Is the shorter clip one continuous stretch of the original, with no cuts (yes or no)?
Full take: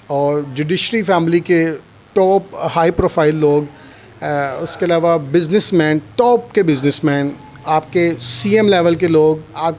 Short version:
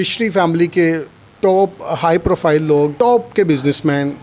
no